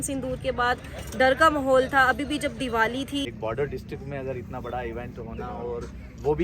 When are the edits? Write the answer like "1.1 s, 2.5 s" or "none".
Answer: 3.3 s